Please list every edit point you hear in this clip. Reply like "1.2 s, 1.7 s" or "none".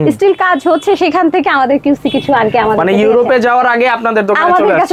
none